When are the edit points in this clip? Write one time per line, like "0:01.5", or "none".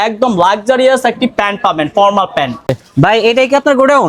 0:02.6

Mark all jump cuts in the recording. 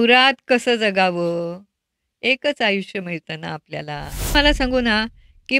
0:04.3

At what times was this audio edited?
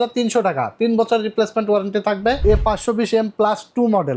0:02.4

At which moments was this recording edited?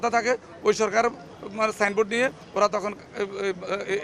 none

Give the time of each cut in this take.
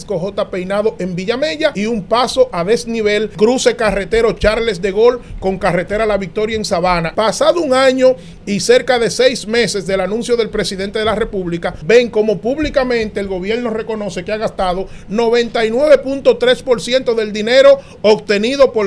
0:01.8
0:03.3
0:07.1
0:11.8

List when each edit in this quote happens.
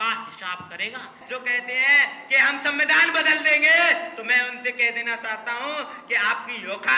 0:01.2

